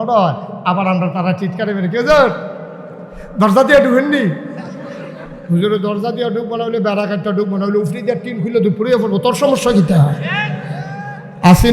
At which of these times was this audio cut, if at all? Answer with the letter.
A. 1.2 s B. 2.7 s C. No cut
C